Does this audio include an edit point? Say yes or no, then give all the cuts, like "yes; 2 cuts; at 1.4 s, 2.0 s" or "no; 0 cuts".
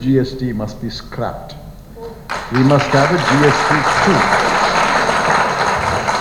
no; 0 cuts